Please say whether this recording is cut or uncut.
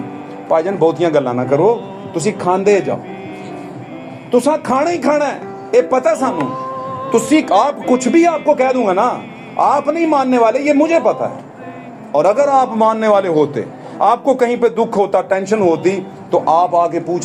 uncut